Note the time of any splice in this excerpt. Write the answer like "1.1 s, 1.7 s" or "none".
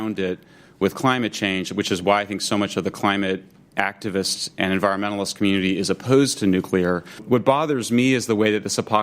7.2 s